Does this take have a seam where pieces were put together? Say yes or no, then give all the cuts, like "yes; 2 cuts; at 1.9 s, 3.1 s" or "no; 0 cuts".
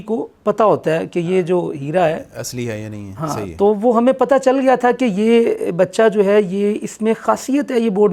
no; 0 cuts